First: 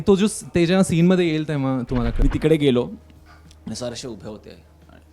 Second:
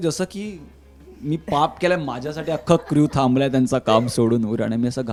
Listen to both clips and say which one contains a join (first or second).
first